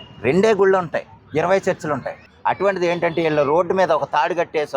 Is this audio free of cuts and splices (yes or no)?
no